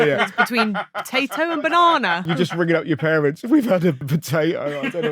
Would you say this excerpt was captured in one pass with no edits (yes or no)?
no